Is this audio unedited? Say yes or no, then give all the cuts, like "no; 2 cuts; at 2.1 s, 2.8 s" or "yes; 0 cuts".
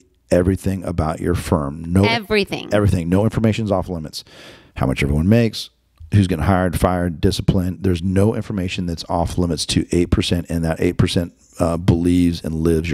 yes; 0 cuts